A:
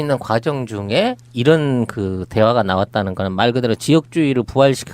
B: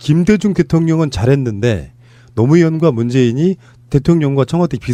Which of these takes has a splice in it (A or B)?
A